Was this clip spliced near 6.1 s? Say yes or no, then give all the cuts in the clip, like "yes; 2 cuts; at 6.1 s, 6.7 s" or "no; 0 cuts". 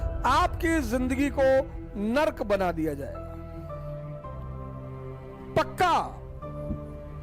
yes; 1 cut; at 6.1 s